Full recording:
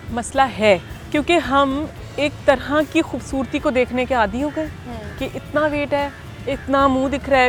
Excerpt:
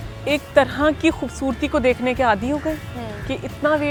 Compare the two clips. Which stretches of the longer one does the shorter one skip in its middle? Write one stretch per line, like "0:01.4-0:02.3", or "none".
none